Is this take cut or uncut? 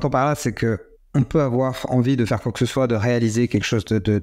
cut